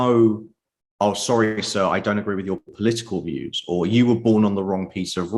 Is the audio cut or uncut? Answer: uncut